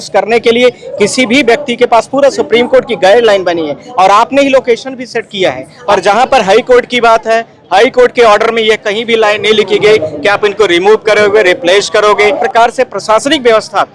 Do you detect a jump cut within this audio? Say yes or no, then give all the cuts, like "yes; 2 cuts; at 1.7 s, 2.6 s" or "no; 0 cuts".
yes; 2 cuts; at 5.7 s, 12.4 s